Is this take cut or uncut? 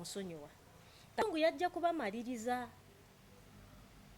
cut